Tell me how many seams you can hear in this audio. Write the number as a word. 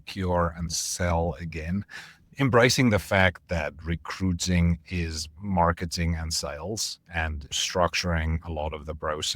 two